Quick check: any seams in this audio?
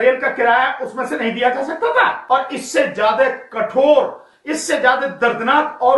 yes; 1 cut; at 2.2 s

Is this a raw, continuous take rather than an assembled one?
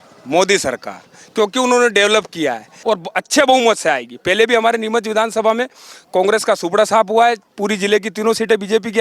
no; 1 cut; at 2.7 s

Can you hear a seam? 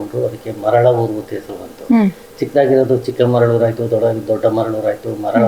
no; 0 cuts

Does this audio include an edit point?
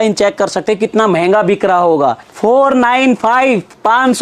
yes; 1 cut; at 2.2 s

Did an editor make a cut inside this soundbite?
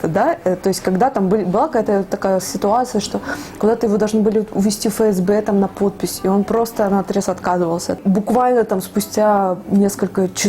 yes; 1 cut; at 8.0 s

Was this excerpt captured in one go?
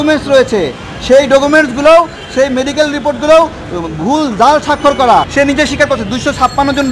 no; 1 cut; at 5.3 s

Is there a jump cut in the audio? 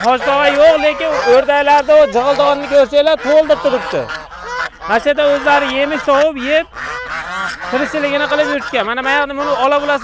no; 0 cuts

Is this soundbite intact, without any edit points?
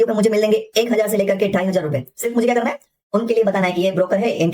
yes; 0 cuts

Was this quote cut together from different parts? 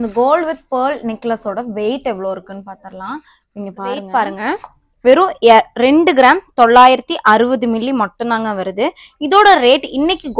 no; 0 cuts

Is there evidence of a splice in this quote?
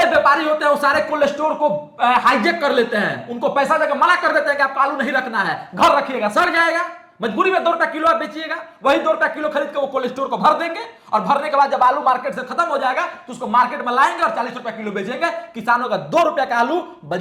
no; 0 cuts

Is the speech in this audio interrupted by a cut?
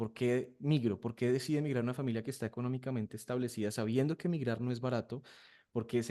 no; 0 cuts

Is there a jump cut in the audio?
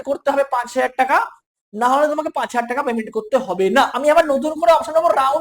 yes; 1 cut; at 3.9 s

